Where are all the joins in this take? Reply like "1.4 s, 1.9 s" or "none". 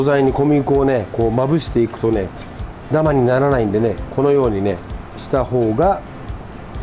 none